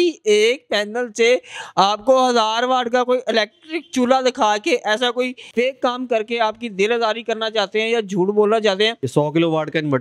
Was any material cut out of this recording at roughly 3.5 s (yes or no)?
no